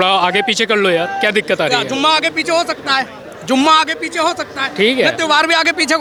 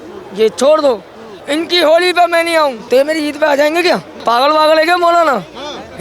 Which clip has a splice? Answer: second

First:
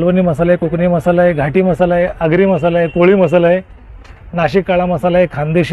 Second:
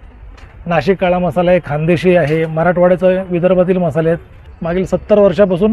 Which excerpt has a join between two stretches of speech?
second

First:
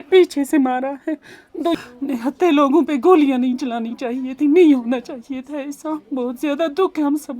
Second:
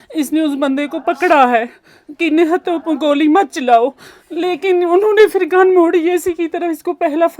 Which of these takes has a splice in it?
first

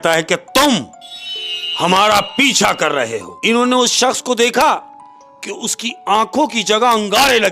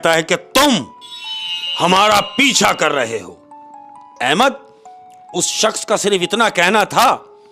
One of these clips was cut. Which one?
first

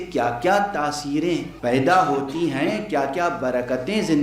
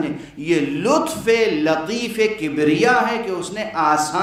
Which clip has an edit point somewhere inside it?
first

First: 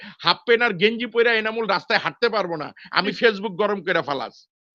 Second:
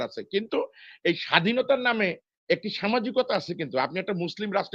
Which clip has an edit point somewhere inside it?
first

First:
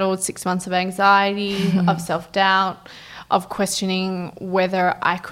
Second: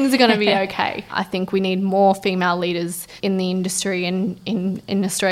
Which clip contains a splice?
second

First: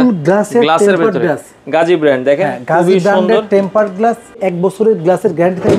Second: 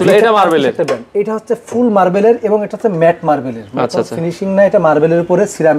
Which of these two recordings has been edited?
first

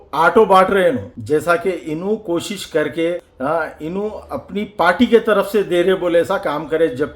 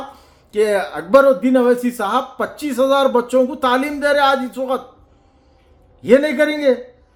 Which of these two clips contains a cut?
first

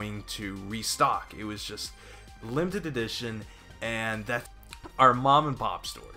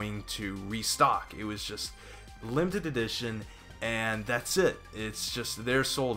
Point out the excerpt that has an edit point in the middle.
second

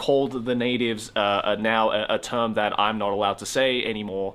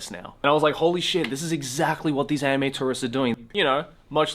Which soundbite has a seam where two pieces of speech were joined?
second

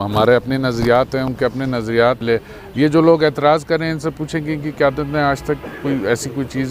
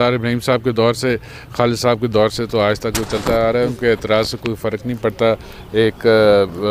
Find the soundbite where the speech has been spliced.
first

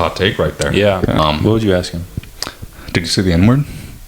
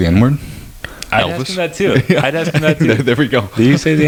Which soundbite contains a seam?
first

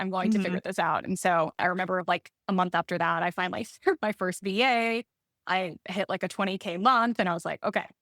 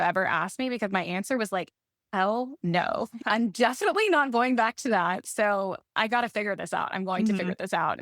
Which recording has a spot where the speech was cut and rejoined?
second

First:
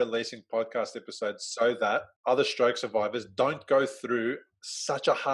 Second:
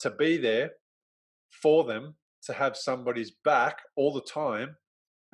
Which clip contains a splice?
first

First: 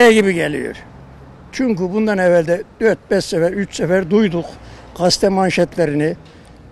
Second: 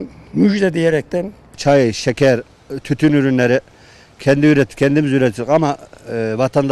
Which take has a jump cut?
second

